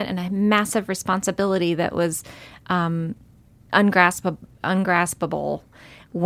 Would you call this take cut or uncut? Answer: uncut